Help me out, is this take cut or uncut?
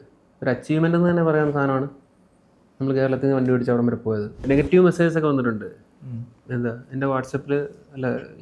cut